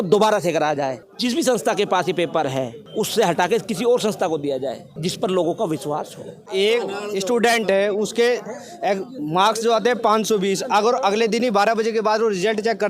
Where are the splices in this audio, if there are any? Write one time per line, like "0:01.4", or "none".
0:01.1
0:02.8
0:04.9
0:06.5